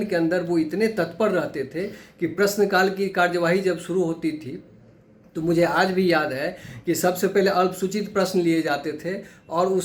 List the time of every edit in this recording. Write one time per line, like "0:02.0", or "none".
none